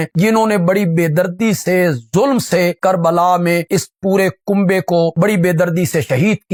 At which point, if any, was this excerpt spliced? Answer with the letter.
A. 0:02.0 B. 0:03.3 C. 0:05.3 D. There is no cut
D